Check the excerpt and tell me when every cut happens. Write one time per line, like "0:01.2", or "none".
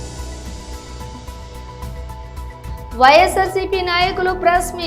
0:01.4

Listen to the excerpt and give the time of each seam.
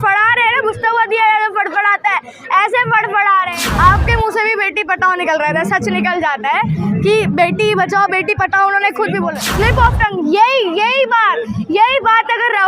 0:03.5
0:09.4

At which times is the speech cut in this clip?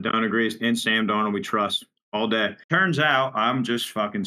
0:02.6

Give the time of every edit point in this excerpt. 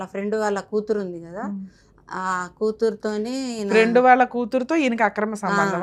none

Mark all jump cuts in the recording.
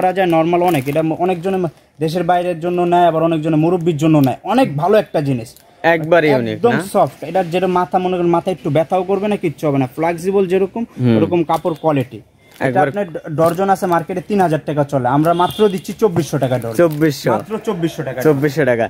none

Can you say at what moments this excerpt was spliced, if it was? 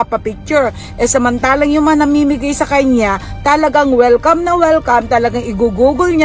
none

